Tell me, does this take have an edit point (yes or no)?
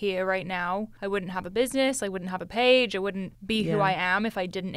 yes